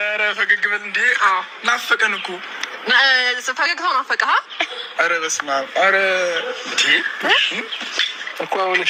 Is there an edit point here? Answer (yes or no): no